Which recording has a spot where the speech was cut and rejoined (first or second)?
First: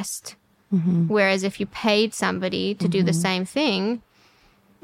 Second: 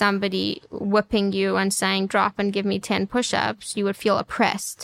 second